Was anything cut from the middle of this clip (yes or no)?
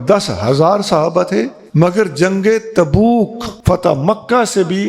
yes